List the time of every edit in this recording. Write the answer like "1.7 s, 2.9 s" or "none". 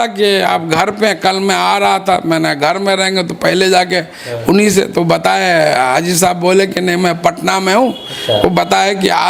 none